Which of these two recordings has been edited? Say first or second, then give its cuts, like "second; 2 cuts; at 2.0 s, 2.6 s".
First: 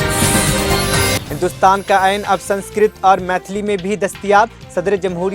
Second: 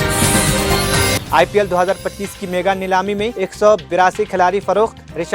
first; 1 cut; at 1.2 s